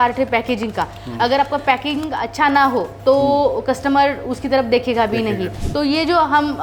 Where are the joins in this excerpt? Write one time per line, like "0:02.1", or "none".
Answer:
0:05.6

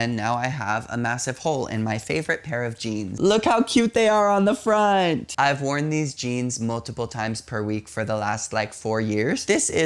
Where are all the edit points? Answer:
none

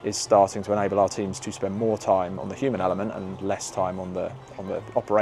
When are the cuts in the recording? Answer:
none

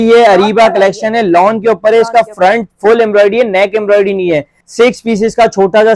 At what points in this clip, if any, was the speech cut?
0:04.6

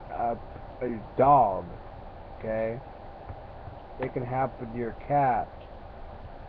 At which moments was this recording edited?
0:03.6

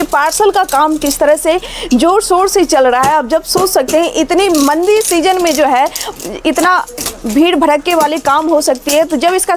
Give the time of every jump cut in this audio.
none

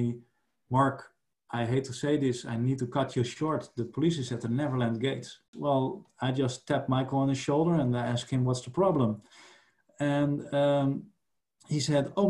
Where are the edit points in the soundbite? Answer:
0:05.4

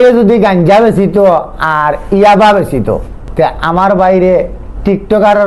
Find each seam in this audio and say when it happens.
0:03.2

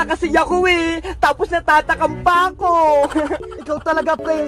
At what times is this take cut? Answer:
0:03.5

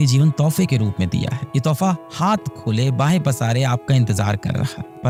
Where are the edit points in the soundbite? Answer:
none

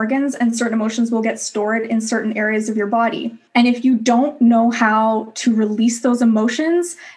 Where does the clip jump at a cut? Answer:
0:03.4

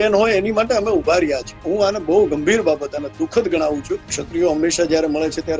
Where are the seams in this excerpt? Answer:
0:01.6
0:04.2

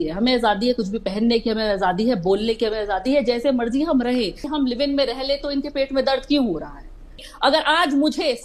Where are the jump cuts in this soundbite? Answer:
0:04.4
0:07.2

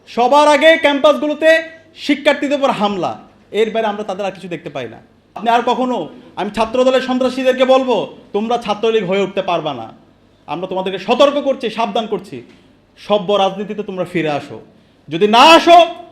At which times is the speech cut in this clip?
0:05.4

